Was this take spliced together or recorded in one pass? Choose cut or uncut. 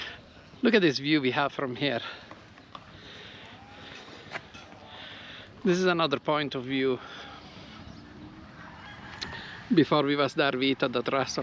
uncut